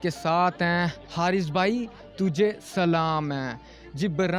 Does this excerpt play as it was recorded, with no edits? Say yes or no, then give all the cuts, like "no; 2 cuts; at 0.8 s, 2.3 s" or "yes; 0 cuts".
no; 1 cut; at 1.0 s